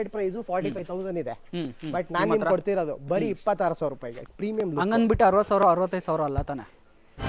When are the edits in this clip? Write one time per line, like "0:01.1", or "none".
0:04.2